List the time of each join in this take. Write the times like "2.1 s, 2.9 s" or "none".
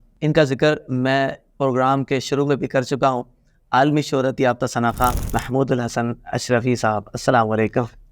5.2 s